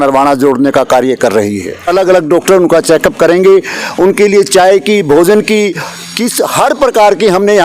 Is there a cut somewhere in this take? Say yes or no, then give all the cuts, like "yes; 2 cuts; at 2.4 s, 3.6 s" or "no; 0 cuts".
yes; 1 cut; at 1.9 s